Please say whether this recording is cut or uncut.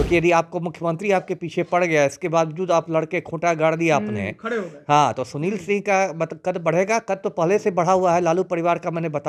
uncut